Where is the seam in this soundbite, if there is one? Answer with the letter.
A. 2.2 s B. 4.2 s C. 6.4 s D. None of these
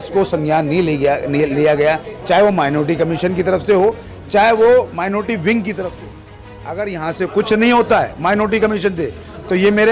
C